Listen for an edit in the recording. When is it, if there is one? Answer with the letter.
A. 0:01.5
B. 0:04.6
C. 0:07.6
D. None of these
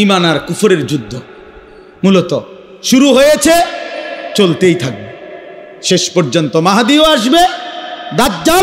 D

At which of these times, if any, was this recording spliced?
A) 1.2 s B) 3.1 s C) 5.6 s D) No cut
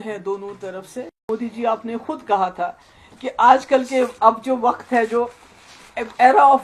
A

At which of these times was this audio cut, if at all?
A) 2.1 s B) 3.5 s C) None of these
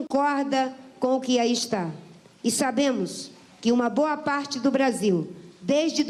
C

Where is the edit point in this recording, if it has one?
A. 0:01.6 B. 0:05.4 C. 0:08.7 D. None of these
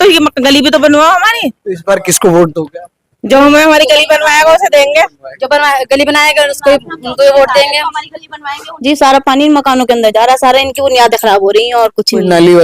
C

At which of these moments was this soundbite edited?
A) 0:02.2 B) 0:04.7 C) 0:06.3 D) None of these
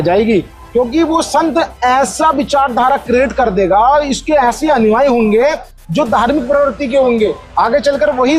D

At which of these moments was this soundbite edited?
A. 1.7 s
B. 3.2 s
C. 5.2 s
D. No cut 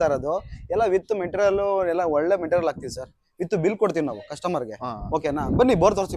D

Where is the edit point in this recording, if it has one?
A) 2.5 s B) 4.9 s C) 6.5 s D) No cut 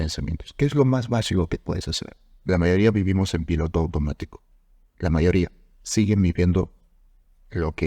A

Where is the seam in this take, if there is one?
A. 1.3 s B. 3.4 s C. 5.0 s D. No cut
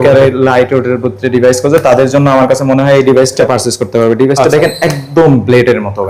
B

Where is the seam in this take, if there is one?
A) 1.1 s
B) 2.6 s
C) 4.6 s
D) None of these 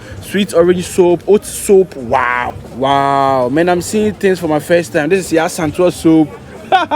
B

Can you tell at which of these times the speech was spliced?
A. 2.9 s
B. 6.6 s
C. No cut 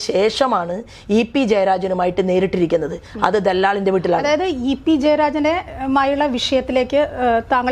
C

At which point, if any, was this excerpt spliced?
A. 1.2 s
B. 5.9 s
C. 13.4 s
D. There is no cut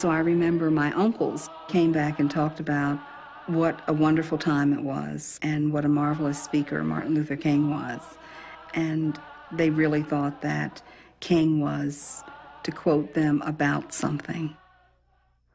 B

